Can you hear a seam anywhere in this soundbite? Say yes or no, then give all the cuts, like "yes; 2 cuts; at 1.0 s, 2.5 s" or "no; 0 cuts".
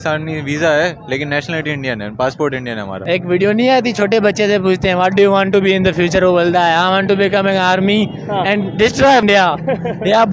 yes; 2 cuts; at 3.0 s, 9.2 s